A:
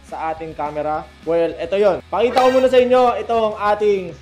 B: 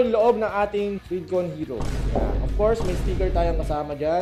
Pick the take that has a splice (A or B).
A